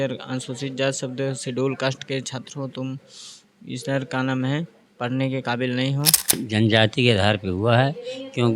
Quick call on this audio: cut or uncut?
cut